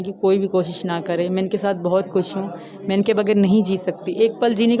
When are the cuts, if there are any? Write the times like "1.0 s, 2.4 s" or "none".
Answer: none